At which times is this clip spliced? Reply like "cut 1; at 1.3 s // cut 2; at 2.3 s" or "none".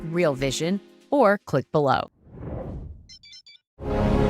cut 1; at 2.2 s